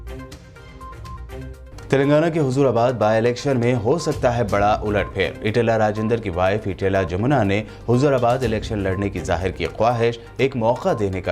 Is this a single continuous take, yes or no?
no